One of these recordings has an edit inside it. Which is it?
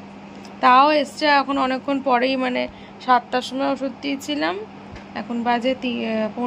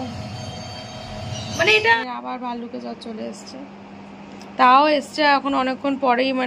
second; 1 cut; at 2.0 s

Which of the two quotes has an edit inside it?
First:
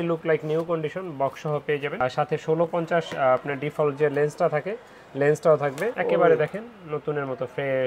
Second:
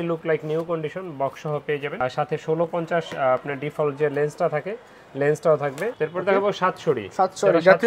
second; 1 cut; at 5.9 s

